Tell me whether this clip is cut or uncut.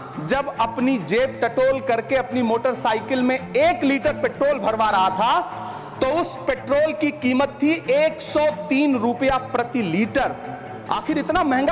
uncut